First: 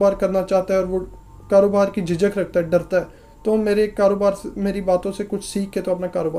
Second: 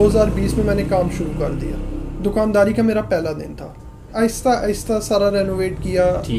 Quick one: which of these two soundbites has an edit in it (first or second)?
second